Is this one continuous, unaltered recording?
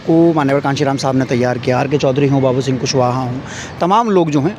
yes; 0 cuts

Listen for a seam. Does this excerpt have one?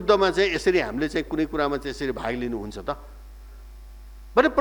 no; 0 cuts

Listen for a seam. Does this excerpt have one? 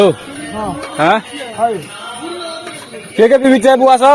no; 0 cuts

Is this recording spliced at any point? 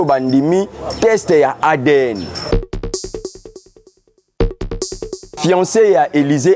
yes; 2 cuts; at 2.5 s, 5.3 s

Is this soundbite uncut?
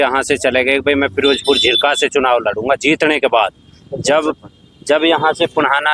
yes; 0 cuts

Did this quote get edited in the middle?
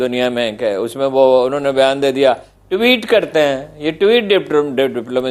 no; 0 cuts

